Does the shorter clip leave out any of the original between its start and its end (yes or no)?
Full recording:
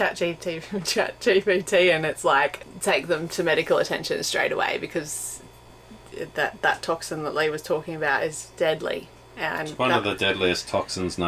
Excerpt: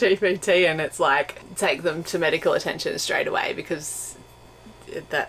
no